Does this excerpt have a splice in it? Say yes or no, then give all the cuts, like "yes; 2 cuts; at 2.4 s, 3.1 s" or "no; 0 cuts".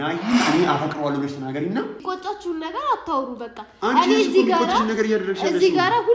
yes; 1 cut; at 2.0 s